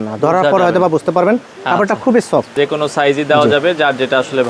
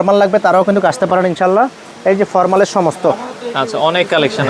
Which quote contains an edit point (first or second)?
first